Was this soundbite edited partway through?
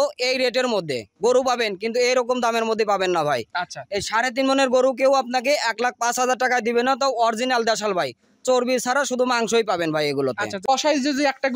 yes; 1 cut; at 10.6 s

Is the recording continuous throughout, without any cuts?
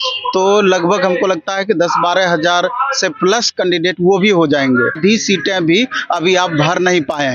no; 1 cut; at 5.0 s

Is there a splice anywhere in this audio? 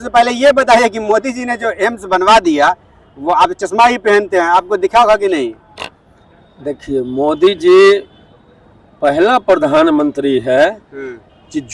no; 0 cuts

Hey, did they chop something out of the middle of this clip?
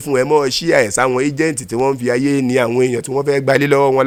no; 0 cuts

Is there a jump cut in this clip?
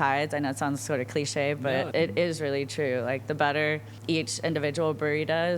yes; 2 cuts; at 1.6 s, 3.9 s

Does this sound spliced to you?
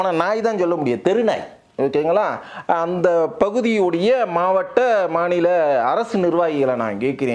no; 0 cuts

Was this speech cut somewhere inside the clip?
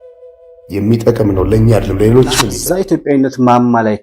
yes; 1 cut; at 2.6 s

